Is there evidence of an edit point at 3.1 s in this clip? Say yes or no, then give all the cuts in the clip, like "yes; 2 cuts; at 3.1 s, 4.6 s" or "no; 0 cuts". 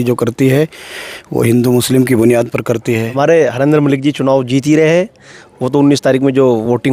yes; 1 cut; at 3.1 s